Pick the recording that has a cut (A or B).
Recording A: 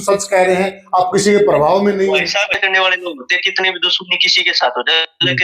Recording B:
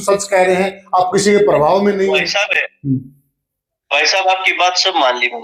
A